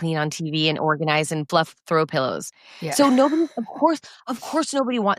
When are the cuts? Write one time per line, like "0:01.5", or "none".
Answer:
0:01.4